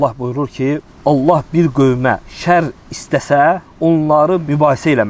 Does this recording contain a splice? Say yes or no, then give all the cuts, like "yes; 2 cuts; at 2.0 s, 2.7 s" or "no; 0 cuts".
yes; 3 cuts; at 0.9 s, 2.3 s, 4.2 s